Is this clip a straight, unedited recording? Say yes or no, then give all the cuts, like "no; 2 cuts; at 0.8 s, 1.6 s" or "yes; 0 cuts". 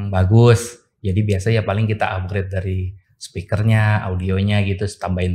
yes; 0 cuts